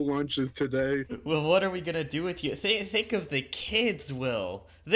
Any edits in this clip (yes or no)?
yes